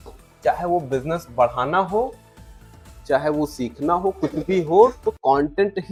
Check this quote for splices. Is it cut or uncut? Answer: uncut